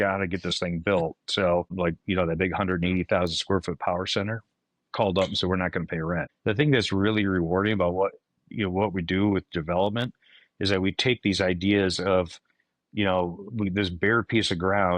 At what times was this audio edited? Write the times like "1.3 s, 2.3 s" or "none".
1.7 s, 6.3 s